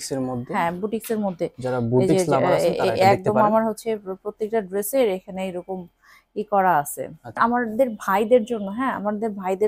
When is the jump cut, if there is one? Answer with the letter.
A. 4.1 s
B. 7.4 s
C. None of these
B